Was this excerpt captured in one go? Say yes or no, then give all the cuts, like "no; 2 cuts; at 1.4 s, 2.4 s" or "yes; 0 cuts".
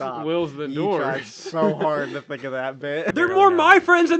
no; 1 cut; at 3.1 s